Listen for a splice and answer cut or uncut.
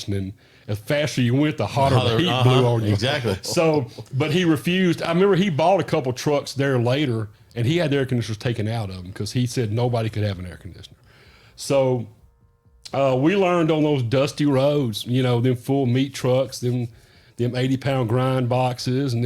uncut